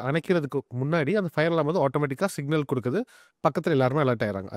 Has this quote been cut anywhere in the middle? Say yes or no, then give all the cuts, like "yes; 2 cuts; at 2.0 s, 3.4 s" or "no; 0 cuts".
no; 0 cuts